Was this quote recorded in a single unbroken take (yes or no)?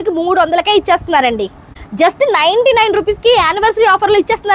no